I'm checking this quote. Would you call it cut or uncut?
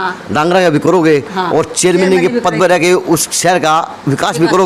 uncut